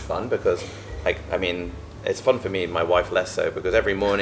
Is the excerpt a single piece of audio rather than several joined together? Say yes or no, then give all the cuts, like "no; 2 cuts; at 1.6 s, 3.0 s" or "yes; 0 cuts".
yes; 0 cuts